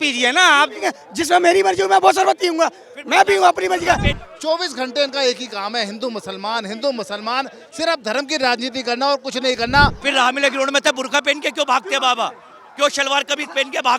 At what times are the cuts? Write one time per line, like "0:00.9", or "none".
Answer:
0:04.1
0:10.0

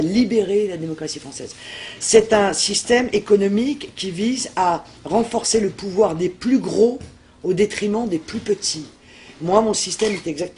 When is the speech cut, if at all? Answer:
0:08.3

